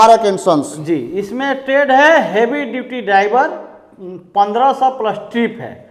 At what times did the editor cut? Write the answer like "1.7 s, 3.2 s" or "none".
none